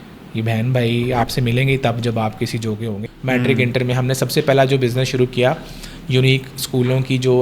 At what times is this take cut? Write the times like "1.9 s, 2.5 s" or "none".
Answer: 3.0 s